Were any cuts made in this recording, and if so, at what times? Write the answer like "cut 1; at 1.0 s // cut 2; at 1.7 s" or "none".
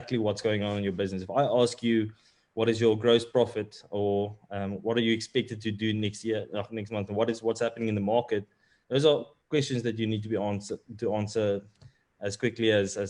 none